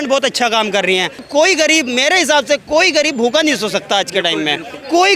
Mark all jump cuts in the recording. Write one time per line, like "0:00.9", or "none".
0:01.2

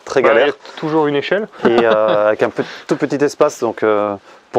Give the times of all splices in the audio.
none

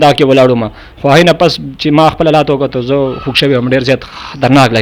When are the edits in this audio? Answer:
none

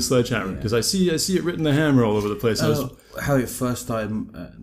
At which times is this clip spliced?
none

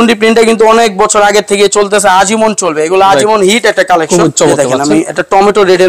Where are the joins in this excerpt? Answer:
0:04.5

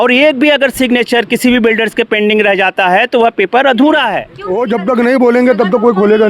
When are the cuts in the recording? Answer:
0:04.3

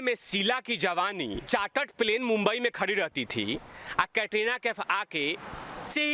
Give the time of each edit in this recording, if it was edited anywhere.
0:01.4

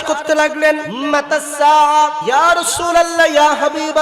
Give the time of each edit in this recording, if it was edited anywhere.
0:00.9
0:02.2

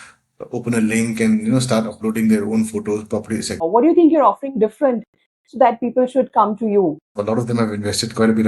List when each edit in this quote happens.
0:03.6
0:07.2

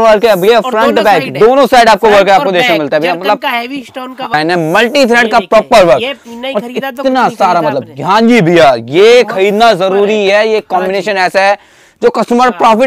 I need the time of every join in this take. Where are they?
0:04.3

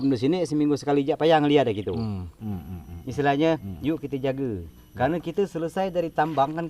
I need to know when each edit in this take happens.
0:02.4

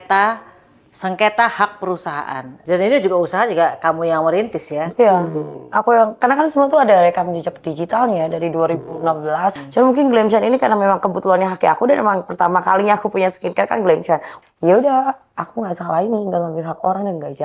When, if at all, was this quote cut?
0:02.5
0:09.6
0:14.3

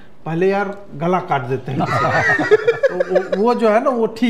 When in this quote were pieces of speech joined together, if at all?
none

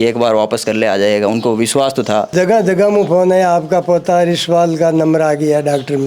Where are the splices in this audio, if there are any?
0:02.3

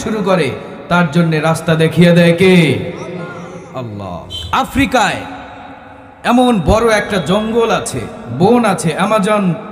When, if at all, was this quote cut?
0:04.3

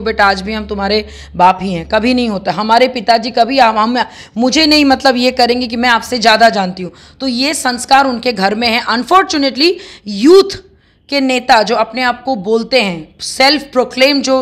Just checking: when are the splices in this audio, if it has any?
none

